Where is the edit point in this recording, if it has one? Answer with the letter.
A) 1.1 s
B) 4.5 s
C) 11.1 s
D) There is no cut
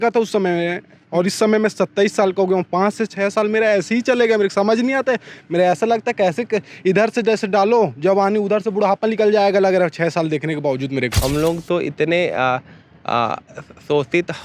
C